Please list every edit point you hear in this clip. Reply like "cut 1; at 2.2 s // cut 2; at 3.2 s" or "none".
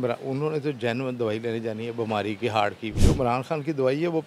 none